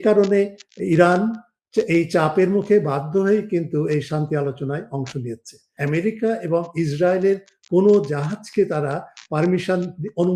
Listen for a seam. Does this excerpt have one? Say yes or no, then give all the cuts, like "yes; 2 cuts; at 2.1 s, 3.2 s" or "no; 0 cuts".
yes; 1 cut; at 5.8 s